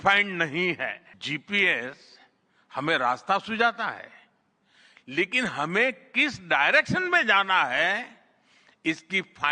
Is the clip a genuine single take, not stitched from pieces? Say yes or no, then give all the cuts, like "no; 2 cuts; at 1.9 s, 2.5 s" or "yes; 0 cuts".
no; 1 cut; at 1.1 s